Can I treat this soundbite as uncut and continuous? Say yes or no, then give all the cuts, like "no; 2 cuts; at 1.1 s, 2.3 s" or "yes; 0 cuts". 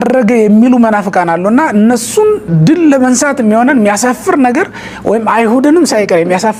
yes; 0 cuts